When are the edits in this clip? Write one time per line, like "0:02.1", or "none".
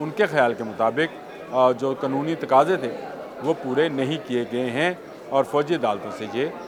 none